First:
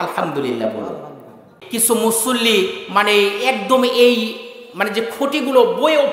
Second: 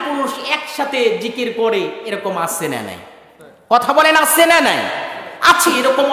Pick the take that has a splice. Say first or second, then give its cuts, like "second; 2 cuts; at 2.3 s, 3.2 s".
first; 1 cut; at 1.5 s